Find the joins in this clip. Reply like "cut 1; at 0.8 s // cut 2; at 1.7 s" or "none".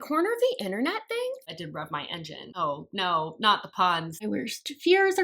cut 1; at 1.4 s // cut 2; at 4.2 s